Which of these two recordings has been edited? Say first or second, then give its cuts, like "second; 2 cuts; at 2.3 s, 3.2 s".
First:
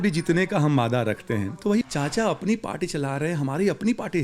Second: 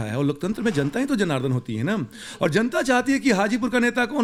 first; 1 cut; at 1.8 s